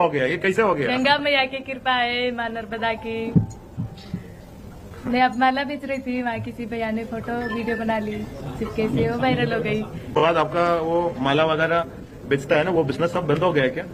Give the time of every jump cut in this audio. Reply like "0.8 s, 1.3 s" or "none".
none

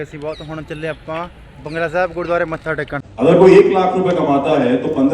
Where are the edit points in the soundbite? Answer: 3.1 s

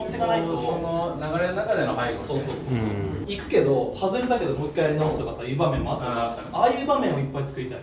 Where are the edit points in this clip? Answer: 3.3 s

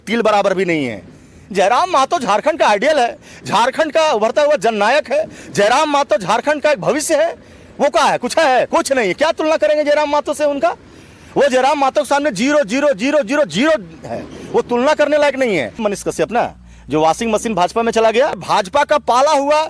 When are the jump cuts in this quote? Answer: 15.8 s, 18.4 s

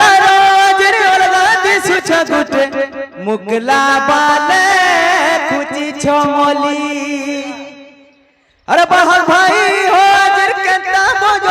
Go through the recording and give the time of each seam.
none

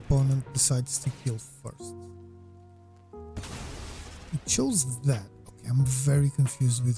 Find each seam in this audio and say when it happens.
1.8 s, 3.3 s

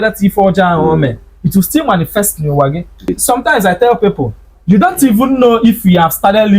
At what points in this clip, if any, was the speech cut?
3.1 s

